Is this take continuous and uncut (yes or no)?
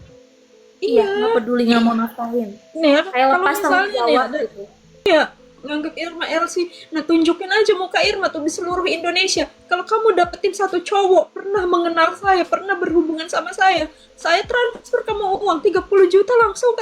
no